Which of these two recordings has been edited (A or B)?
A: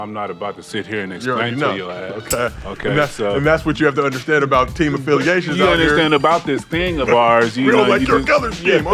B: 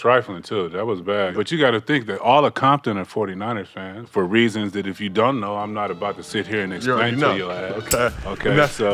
B